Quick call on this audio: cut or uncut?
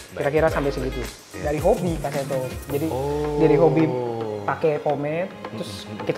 cut